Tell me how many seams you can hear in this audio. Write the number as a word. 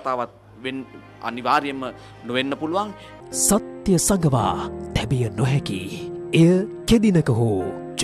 one